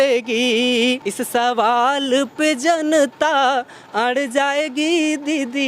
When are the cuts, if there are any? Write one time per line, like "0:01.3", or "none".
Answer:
0:01.1